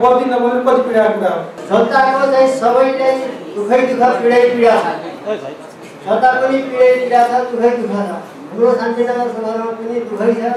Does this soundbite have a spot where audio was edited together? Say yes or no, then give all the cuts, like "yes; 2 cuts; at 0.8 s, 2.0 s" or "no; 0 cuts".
yes; 1 cut; at 1.6 s